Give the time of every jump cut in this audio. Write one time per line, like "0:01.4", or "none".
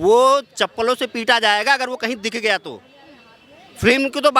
none